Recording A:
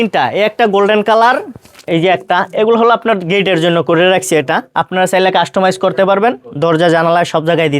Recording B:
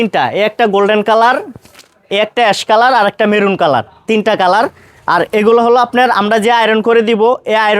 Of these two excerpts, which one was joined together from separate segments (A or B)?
A